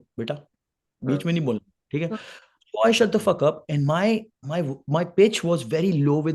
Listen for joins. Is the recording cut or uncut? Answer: uncut